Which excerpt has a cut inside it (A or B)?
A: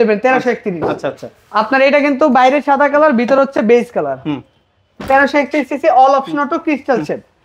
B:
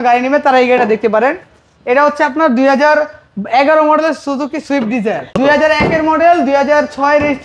B